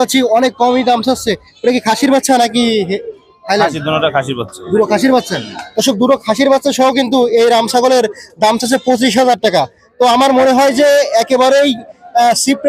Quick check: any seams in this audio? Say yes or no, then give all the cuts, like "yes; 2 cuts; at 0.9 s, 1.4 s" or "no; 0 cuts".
no; 0 cuts